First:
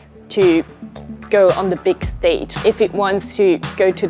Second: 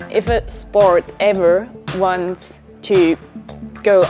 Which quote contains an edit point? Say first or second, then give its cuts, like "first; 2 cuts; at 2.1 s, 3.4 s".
first; 1 cut; at 2.5 s